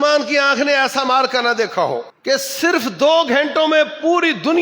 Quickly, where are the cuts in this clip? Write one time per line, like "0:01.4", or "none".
0:02.1